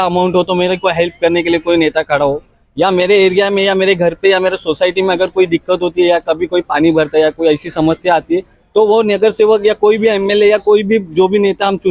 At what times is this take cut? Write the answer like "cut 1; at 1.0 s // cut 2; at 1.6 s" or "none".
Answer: none